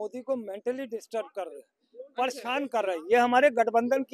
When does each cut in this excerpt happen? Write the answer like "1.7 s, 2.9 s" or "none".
none